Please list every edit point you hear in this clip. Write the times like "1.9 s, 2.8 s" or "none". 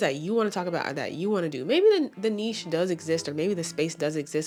none